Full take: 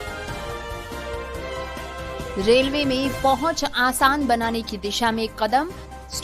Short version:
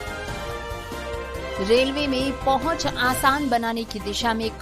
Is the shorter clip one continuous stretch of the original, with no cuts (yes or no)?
no